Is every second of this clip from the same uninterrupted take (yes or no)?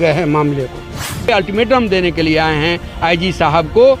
no